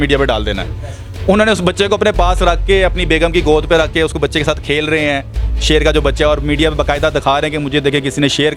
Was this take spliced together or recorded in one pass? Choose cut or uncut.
uncut